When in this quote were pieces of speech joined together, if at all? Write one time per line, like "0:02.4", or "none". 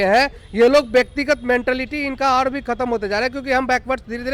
none